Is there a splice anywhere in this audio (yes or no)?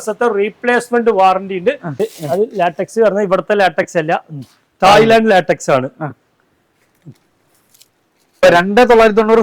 yes